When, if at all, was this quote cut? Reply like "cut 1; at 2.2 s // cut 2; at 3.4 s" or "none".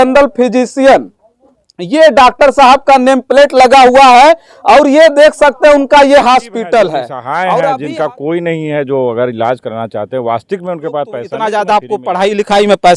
cut 1; at 7.7 s // cut 2; at 11.3 s

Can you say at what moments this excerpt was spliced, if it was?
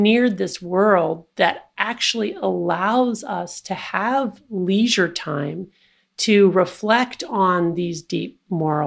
none

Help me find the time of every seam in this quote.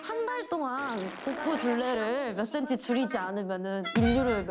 none

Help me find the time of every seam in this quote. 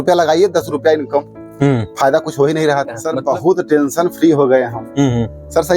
cut 1; at 3.1 s

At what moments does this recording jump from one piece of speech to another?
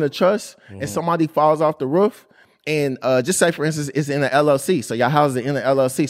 none

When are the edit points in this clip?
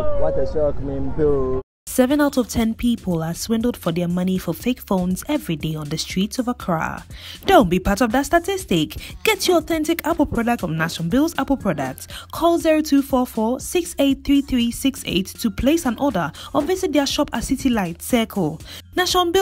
cut 1; at 0.9 s

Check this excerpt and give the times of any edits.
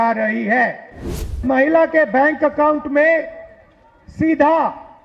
cut 1; at 1.4 s

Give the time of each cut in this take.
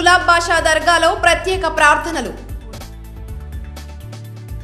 cut 1; at 2.5 s

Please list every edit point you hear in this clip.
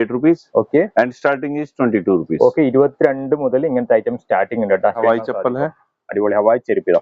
cut 1; at 5.0 s

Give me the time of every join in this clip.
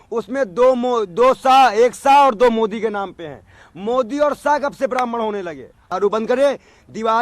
cut 1; at 5.8 s

